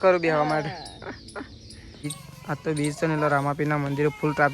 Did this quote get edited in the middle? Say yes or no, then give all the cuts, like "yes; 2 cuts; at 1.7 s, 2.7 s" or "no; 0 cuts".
yes; 1 cut; at 2.0 s